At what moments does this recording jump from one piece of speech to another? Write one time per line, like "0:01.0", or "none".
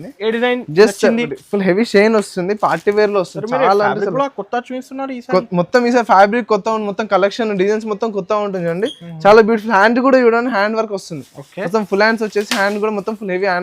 0:01.4

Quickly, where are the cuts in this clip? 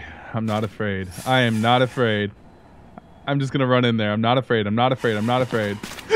none

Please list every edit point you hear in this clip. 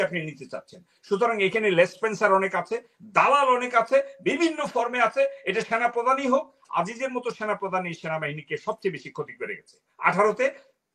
none

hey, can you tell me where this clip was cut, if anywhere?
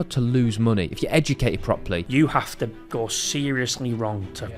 0:02.0

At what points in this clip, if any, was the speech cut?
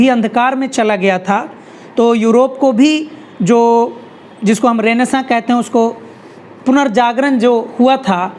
none

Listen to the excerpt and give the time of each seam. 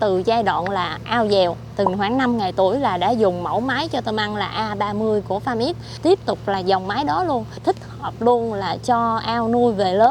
0:01.7
0:05.9
0:07.6

